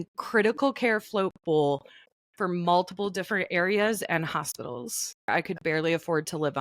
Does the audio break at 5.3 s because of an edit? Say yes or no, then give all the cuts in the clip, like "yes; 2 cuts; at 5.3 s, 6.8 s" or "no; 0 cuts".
yes; 1 cut; at 5.3 s